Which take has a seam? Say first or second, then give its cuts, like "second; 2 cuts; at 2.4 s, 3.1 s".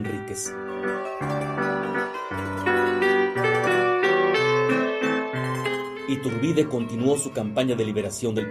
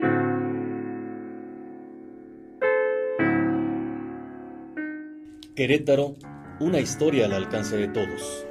first; 1 cut; at 4.7 s